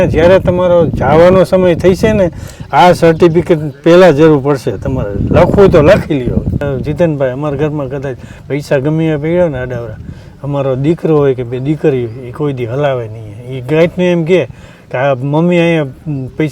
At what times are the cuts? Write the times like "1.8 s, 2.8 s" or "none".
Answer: 6.7 s